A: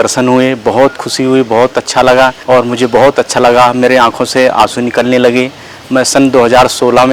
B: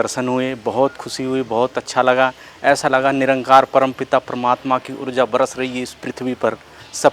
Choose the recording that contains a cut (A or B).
A